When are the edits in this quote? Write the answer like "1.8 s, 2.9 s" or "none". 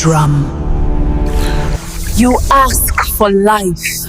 1.8 s